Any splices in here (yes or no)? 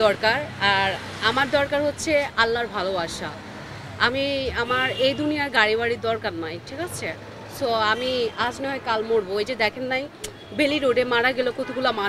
no